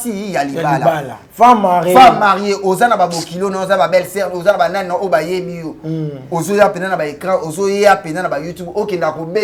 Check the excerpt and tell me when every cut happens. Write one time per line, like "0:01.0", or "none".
none